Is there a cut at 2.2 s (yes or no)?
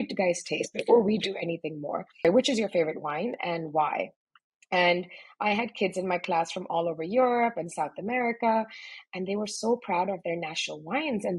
yes